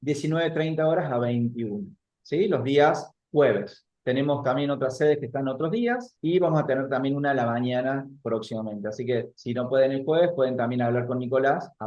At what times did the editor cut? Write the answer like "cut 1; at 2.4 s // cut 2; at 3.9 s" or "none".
none